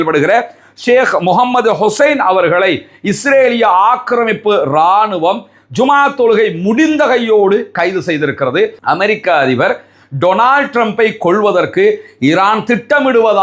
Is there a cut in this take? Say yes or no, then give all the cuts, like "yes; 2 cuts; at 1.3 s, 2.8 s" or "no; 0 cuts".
yes; 1 cut; at 8.8 s